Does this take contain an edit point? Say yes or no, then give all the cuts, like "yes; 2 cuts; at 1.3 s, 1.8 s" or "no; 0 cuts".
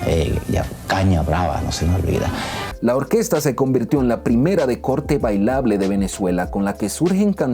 yes; 1 cut; at 2.6 s